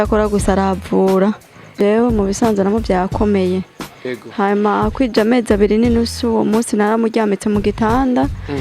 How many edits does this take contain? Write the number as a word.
one